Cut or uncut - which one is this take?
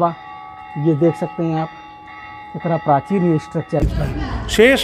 cut